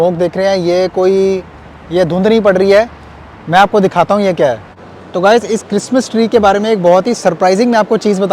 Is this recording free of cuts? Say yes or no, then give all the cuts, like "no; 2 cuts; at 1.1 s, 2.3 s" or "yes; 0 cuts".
no; 1 cut; at 4.5 s